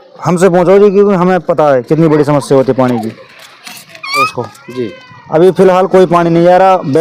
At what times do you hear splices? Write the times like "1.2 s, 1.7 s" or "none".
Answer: 4.3 s